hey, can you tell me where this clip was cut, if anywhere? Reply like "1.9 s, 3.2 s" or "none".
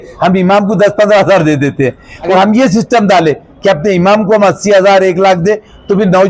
2.1 s